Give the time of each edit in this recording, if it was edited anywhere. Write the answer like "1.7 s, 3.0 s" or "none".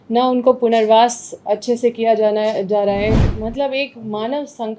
3.2 s